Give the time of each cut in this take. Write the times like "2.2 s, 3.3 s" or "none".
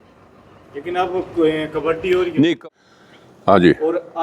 2.6 s